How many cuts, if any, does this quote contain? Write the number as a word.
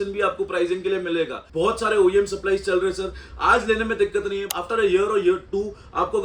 one